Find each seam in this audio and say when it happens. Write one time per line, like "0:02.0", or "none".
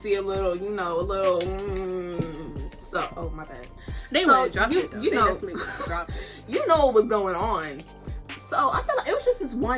none